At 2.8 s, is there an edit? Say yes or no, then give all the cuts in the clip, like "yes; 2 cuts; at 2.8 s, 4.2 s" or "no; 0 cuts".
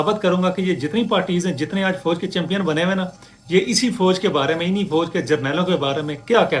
no; 0 cuts